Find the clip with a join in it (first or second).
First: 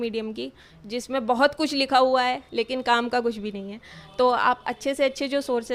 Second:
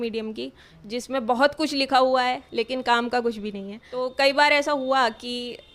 second